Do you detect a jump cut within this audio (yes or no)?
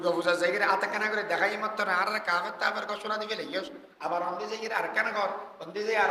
no